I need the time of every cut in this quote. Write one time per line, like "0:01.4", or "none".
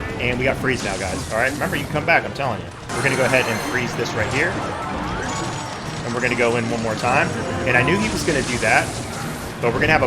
0:02.9